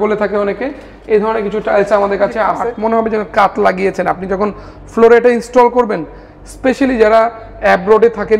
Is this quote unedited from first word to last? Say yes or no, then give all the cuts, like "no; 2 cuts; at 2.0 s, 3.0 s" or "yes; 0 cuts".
no; 1 cut; at 2.6 s